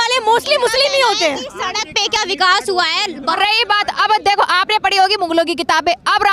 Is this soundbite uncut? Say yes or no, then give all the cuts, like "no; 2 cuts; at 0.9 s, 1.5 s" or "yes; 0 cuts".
no; 1 cut; at 3.4 s